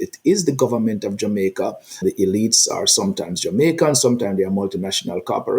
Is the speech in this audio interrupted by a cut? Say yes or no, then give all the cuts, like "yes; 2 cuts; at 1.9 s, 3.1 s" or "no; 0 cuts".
yes; 1 cut; at 2.0 s